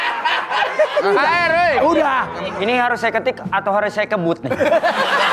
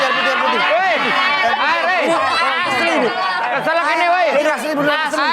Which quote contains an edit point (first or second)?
first